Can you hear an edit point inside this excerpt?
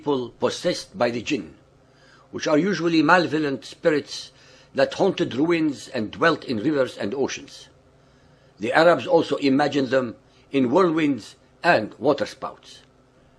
no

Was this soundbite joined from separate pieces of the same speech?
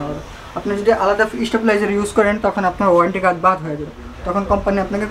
no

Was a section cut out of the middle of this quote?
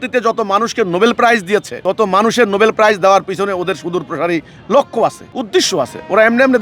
yes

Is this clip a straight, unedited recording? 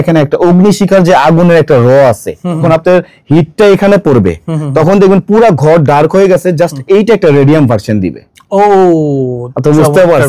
no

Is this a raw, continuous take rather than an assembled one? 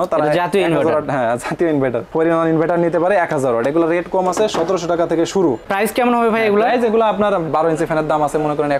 no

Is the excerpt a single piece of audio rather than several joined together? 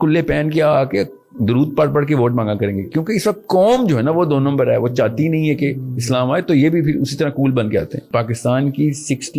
no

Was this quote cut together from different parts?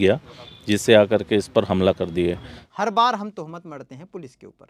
yes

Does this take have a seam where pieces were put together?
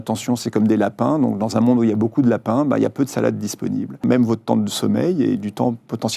yes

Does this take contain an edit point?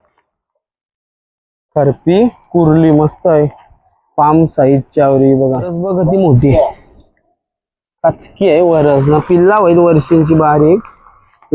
yes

